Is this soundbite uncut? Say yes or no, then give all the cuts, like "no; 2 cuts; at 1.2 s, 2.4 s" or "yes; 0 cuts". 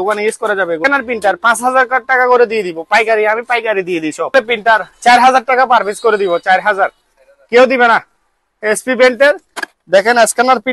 no; 3 cuts; at 0.8 s, 4.3 s, 8.5 s